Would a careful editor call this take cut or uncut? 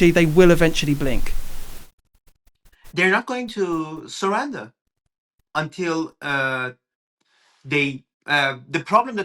uncut